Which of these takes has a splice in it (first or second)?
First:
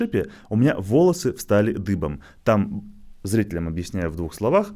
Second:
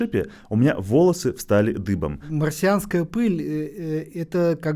second